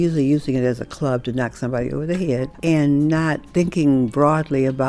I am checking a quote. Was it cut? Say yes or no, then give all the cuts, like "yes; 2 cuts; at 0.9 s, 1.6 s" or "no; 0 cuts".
yes; 1 cut; at 2.5 s